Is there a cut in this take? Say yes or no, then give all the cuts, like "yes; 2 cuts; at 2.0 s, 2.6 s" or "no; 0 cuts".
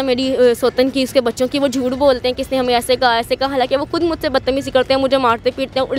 no; 0 cuts